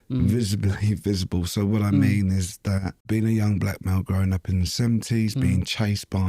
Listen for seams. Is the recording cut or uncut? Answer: cut